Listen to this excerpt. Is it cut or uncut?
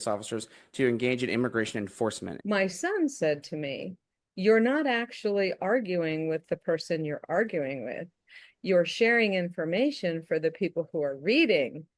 cut